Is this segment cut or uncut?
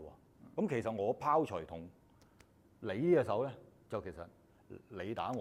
uncut